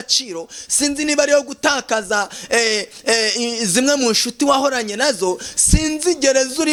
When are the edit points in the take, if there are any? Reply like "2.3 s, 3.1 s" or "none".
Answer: none